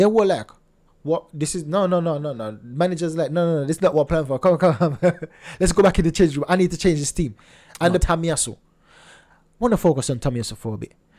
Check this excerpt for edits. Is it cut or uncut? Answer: cut